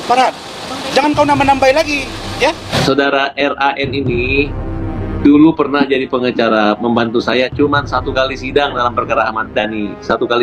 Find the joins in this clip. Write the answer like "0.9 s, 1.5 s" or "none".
2.7 s